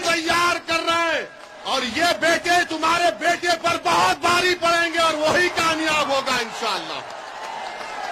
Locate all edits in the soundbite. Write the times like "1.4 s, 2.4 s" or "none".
none